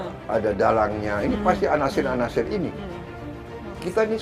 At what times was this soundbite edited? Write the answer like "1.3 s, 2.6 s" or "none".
3.3 s